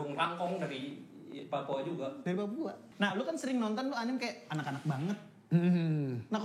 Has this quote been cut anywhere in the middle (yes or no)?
yes